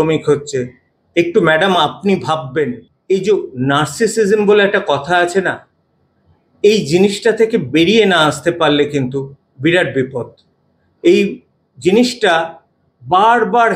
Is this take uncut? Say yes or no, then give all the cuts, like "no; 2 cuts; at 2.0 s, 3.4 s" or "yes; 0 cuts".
no; 1 cut; at 2.9 s